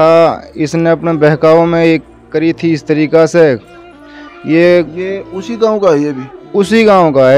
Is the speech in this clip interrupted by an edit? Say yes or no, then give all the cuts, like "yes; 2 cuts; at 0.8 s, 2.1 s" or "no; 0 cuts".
no; 0 cuts